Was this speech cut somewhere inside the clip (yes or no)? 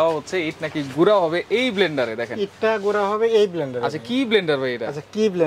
no